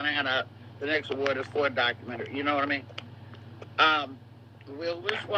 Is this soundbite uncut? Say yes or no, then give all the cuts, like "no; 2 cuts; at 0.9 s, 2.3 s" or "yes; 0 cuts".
no; 1 cut; at 4.2 s